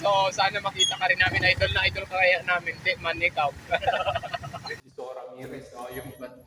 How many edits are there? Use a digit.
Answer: 1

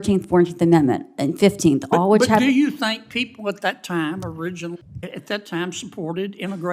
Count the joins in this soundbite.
1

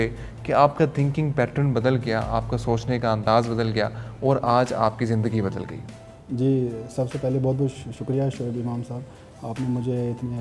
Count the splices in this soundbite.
0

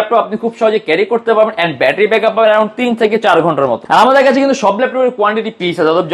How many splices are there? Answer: 0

